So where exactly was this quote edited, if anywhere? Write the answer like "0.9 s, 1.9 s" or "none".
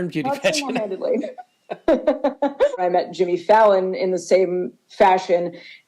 2.8 s